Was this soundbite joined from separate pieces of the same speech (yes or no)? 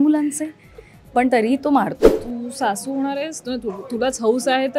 yes